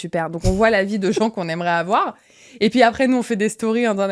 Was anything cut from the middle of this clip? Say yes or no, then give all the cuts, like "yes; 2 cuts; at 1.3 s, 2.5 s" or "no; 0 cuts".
no; 0 cuts